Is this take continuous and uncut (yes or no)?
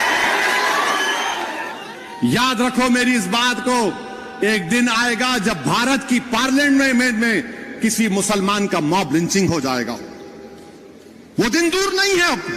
no